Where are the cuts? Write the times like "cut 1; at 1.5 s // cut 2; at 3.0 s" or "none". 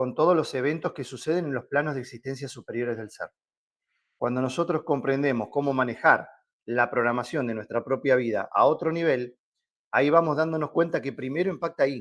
none